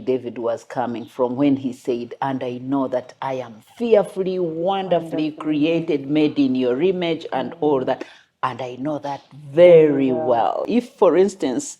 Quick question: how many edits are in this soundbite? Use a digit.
1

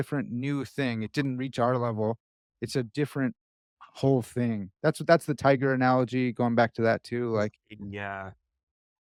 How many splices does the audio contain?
0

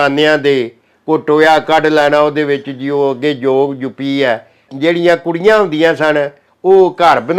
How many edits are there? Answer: 1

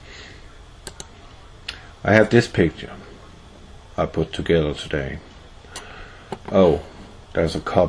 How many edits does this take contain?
0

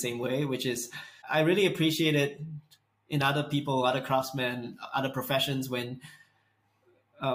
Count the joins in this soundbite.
1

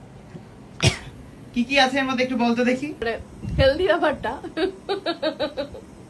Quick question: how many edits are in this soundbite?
1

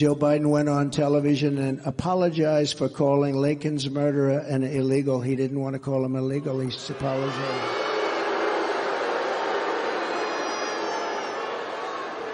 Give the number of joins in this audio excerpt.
0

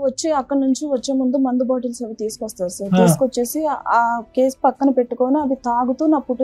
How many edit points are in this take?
0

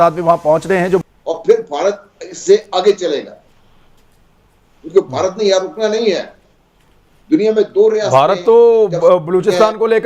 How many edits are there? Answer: 1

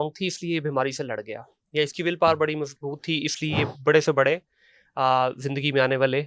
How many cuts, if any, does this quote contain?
0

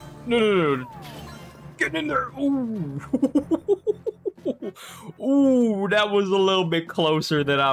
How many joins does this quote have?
0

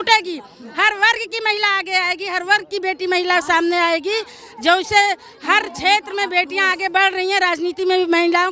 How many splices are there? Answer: 0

